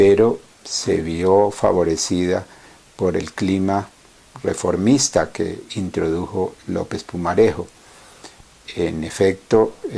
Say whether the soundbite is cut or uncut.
uncut